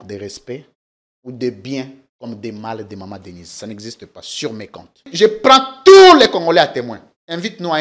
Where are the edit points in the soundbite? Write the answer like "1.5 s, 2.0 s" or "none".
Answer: 5.0 s